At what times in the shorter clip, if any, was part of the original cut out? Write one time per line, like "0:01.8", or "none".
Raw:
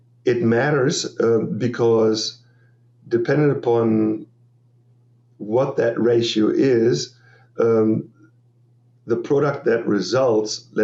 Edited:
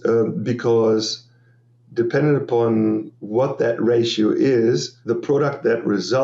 0:03.2
0:04.9